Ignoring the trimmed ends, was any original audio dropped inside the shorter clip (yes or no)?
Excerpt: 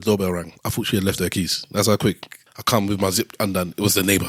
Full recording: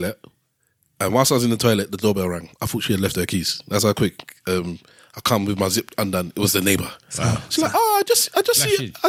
yes